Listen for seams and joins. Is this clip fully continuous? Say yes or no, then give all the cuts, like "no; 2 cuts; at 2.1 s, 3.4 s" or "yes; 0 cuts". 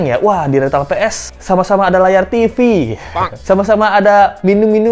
yes; 0 cuts